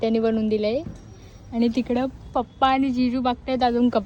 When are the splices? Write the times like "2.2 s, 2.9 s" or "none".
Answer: none